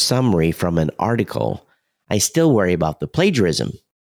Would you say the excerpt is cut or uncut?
uncut